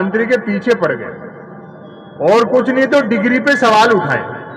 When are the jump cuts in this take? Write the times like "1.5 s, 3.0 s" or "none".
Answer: none